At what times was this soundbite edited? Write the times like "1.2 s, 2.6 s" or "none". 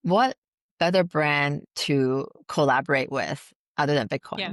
none